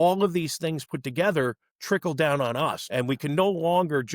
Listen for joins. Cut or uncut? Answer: cut